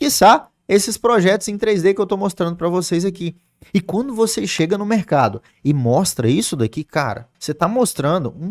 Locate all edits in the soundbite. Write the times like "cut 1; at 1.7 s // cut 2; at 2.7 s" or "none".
cut 1; at 7.3 s